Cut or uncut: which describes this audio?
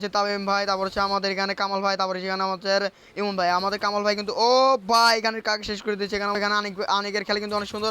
cut